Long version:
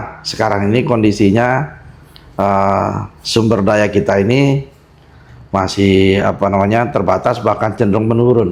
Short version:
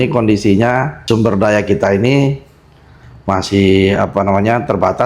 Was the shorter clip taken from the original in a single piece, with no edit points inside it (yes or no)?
no